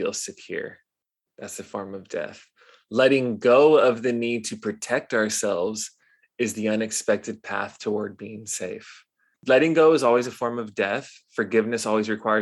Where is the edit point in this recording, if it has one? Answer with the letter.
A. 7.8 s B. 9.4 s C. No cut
B